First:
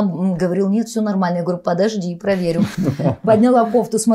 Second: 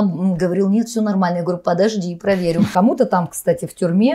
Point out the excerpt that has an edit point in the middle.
second; 1 cut; at 2.7 s

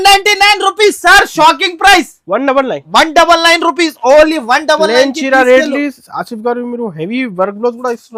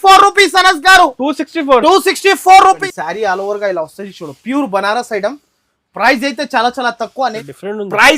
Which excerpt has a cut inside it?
second; 2 cuts; at 2.8 s, 7.4 s

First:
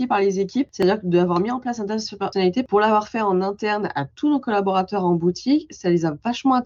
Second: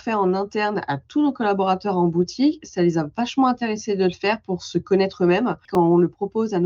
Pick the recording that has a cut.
second; 1 cut; at 5.7 s

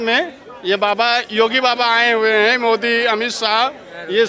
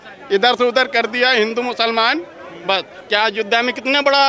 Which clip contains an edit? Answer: second; 1 cut; at 2.9 s

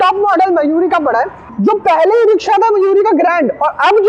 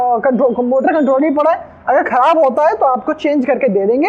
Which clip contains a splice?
first; 1 cut; at 1.4 s

